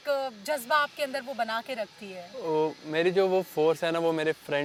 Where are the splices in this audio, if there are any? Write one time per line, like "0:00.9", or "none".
none